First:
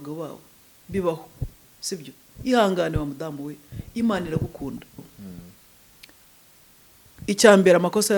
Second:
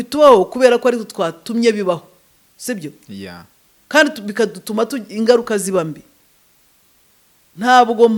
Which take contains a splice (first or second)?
first